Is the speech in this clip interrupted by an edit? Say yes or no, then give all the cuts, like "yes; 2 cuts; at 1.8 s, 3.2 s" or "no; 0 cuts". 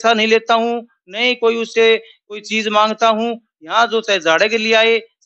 no; 0 cuts